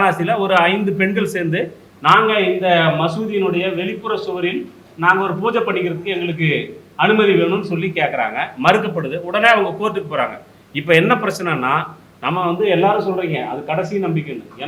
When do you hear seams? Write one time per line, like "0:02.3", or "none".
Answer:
none